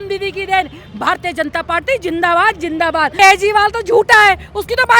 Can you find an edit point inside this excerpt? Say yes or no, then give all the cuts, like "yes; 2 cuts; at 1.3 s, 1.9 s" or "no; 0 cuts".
yes; 1 cut; at 3.1 s